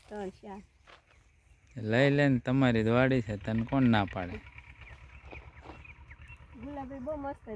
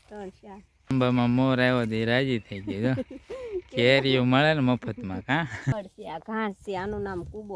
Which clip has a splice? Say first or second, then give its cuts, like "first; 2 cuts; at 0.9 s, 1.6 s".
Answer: second; 2 cuts; at 0.9 s, 5.7 s